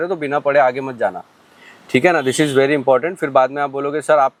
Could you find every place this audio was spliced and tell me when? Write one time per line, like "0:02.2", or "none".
none